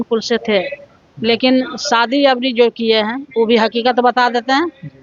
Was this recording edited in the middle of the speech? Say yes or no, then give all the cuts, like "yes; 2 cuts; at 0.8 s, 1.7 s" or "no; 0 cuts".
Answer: no; 0 cuts